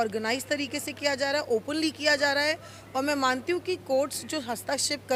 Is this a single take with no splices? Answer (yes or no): yes